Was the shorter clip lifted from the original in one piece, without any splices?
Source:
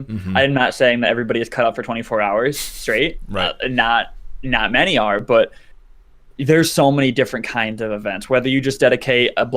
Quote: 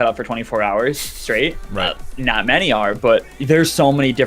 no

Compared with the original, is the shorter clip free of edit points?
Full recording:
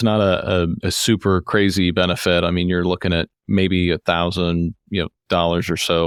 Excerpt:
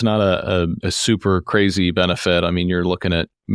yes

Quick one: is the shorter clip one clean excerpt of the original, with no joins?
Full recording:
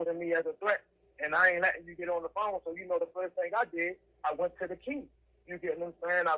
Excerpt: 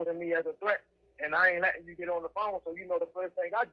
yes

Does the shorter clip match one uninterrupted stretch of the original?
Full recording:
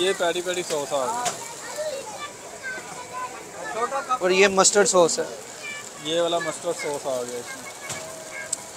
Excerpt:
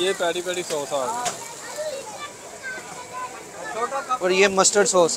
yes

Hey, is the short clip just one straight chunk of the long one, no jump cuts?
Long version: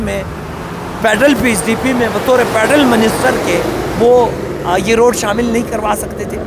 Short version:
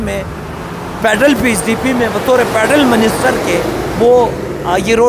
yes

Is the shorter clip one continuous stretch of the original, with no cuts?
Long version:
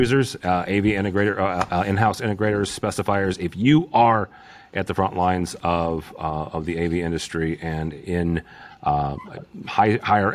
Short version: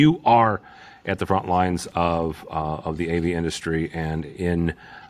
yes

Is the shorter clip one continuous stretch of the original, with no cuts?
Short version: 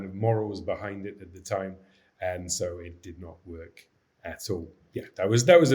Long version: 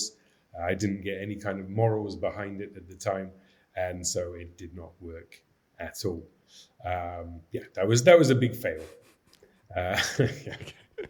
no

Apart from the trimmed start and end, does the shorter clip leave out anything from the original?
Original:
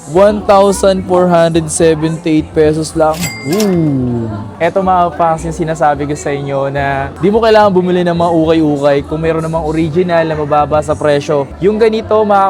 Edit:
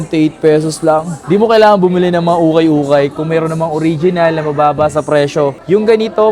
yes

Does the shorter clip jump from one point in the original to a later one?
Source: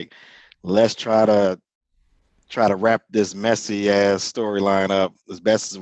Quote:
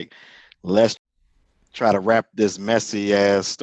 yes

